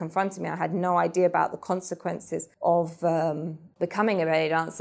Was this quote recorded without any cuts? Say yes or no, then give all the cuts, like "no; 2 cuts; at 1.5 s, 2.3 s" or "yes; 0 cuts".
no; 2 cuts; at 2.4 s, 3.7 s